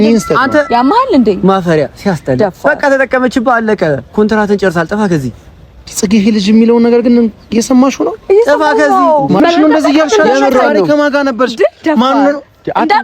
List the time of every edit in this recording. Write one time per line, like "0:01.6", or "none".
0:09.4